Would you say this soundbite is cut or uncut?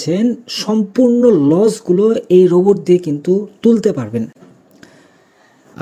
uncut